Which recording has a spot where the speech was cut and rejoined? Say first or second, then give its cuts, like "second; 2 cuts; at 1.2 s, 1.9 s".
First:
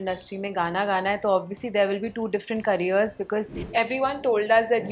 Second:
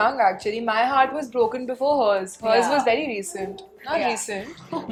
first; 1 cut; at 3.6 s